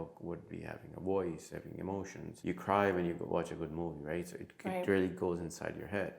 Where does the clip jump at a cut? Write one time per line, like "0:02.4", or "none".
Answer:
0:02.2